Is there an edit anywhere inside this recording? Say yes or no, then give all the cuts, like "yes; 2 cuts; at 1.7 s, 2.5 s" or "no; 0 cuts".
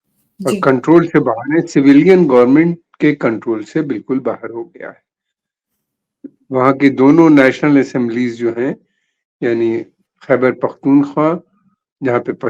no; 0 cuts